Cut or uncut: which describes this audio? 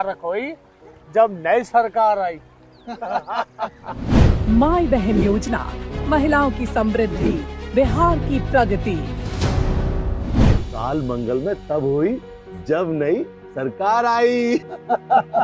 cut